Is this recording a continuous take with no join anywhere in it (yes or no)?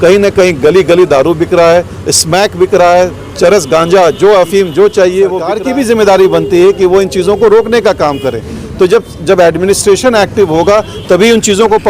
no